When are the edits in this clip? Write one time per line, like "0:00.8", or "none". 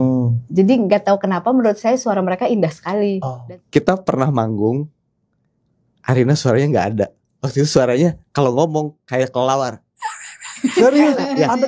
0:03.3